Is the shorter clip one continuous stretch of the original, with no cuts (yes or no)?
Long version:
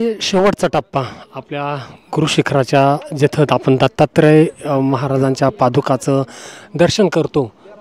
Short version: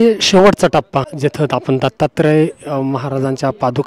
no